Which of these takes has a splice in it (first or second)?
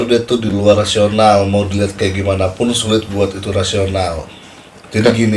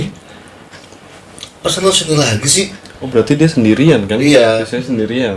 second